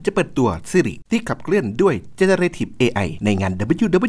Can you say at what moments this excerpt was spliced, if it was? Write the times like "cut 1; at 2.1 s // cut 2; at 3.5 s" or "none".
cut 1; at 1.0 s // cut 2; at 3.1 s